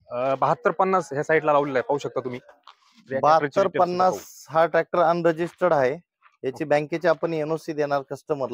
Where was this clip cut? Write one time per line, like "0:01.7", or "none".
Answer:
none

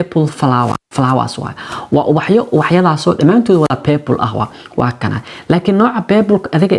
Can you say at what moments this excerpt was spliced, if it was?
none

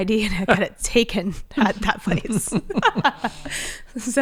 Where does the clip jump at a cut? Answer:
none

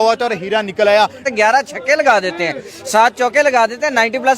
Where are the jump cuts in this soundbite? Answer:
0:01.2

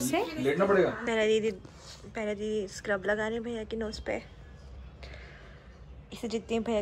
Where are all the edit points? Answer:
0:01.0
0:06.1

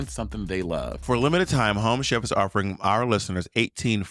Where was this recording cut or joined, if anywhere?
0:01.0

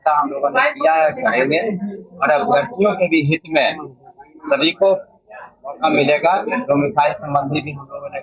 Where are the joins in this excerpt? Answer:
none

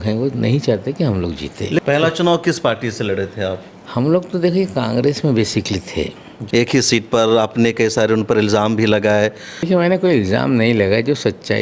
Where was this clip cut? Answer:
0:01.8
0:06.3
0:09.5

